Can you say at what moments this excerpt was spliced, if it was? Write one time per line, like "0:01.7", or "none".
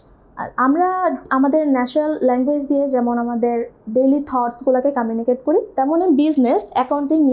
none